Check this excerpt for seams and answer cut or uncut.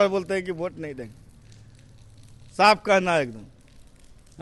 uncut